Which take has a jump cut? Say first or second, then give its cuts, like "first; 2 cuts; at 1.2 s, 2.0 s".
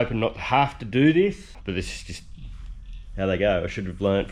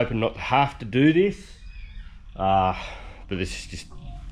first; 1 cut; at 1.5 s